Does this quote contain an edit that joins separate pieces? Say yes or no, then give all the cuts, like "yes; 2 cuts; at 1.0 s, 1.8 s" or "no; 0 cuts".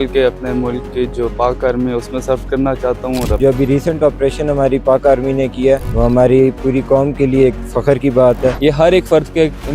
yes; 3 cuts; at 3.4 s, 5.9 s, 8.6 s